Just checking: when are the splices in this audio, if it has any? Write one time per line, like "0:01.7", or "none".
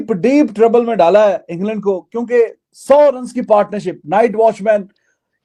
none

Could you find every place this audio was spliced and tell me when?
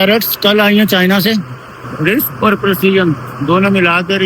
0:01.9

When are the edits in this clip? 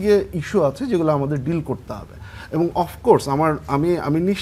none

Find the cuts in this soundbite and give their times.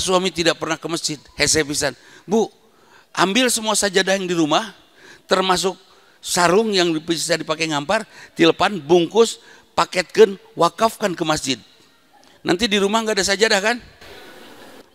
none

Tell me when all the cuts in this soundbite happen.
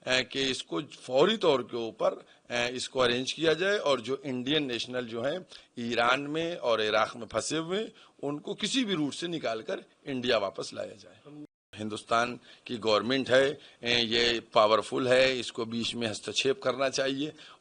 0:11.5

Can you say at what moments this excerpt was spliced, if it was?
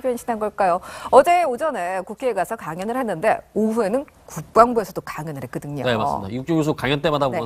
none

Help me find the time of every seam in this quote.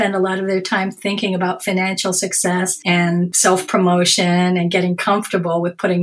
0:03.0

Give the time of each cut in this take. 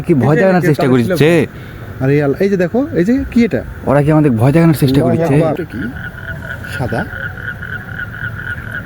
0:05.6

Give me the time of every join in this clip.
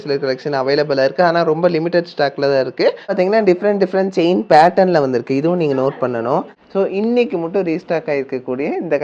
0:03.1
0:06.6

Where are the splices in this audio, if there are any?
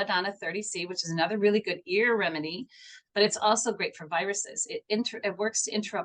none

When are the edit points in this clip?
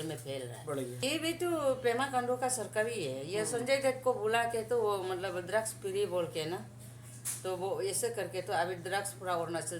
0:01.0

